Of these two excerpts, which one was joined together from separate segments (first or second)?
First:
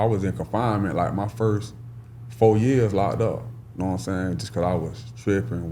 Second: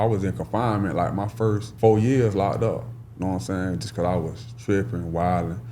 second